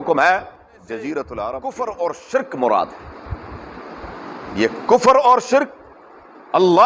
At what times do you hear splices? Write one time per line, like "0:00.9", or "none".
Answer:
0:01.6